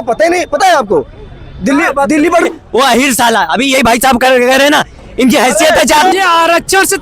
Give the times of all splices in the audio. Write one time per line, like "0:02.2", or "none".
0:02.5
0:06.1